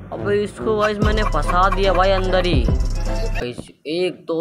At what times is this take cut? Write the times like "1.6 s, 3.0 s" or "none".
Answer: 3.4 s